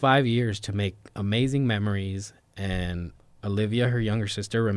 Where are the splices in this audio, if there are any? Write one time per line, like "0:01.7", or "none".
0:03.2